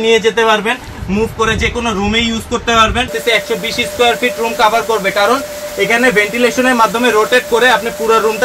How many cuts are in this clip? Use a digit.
1